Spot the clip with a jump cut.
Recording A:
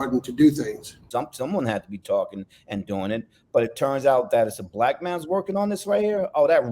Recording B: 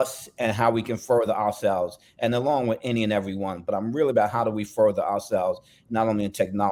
A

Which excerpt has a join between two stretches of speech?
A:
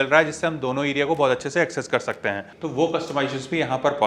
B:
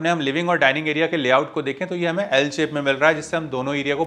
A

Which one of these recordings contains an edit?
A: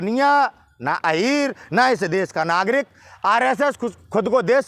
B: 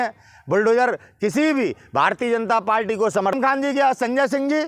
B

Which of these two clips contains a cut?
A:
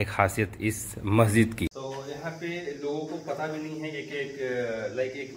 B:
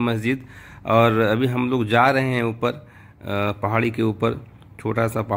A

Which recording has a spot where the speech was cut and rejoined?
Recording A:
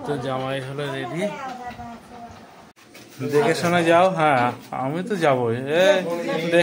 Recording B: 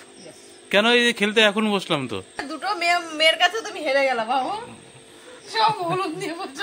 B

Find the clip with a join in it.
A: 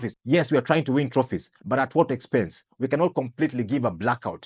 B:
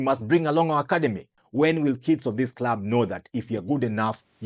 B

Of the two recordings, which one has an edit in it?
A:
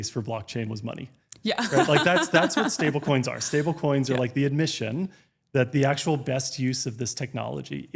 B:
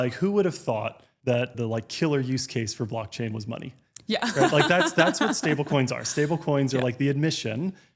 B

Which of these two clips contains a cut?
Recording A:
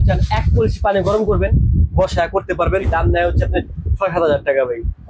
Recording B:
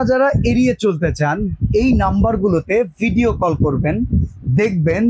A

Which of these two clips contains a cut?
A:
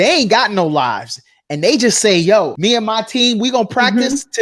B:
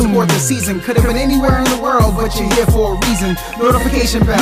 A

